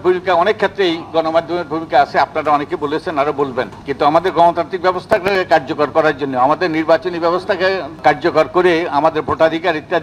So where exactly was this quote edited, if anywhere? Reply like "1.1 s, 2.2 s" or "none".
3.8 s, 8.0 s

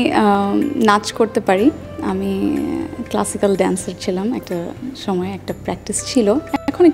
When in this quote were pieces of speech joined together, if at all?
none

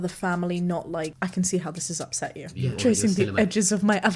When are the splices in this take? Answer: 1.1 s, 2.6 s

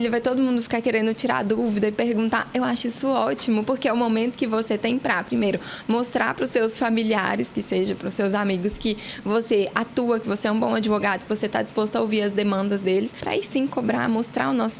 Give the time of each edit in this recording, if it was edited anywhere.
13.2 s

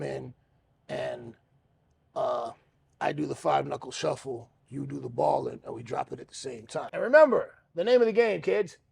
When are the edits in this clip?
6.9 s

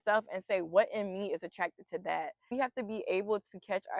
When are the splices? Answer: 2.5 s

